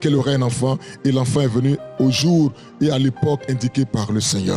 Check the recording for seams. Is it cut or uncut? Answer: uncut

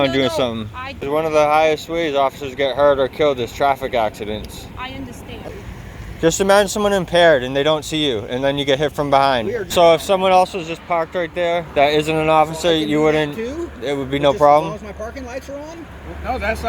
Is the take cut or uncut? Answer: cut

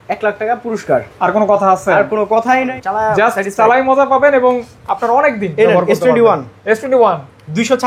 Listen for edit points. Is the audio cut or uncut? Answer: cut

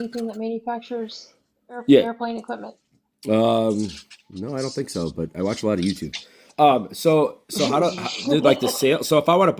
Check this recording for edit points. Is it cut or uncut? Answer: uncut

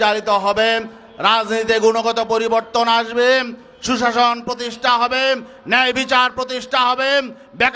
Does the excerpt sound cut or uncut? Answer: uncut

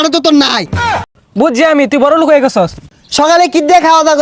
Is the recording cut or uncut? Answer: cut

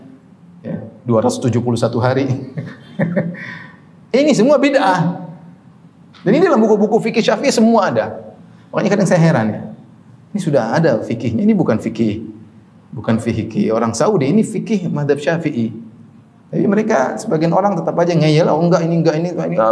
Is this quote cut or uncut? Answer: uncut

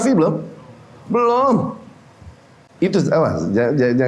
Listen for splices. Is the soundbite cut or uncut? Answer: uncut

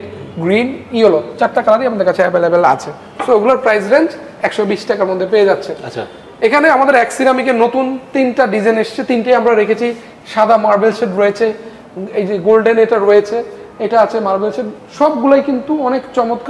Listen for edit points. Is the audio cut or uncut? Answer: uncut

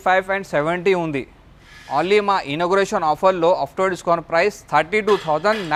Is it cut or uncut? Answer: uncut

